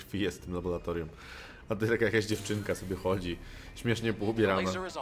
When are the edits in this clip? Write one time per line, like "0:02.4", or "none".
none